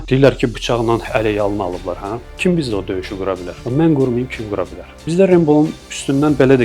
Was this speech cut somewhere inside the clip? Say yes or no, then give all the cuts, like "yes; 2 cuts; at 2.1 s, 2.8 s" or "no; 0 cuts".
yes; 1 cut; at 5.0 s